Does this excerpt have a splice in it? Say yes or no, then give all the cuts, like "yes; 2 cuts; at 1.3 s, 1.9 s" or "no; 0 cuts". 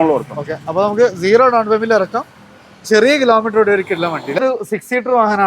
yes; 1 cut; at 4.4 s